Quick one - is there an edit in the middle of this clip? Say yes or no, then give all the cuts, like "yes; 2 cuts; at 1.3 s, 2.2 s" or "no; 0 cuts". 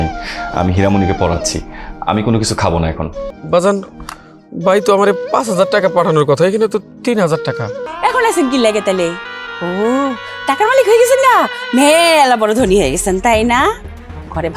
yes; 2 cuts; at 3.2 s, 7.8 s